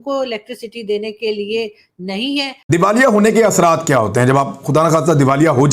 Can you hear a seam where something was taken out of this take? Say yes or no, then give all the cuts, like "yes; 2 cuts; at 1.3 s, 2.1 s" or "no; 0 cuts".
yes; 1 cut; at 2.6 s